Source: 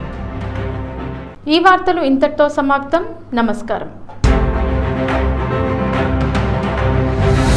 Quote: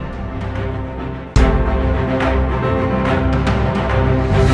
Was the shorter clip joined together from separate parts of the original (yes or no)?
yes